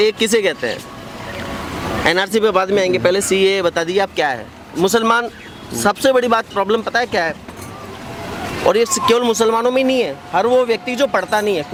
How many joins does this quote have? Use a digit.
0